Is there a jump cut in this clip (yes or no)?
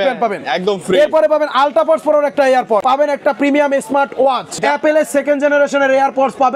yes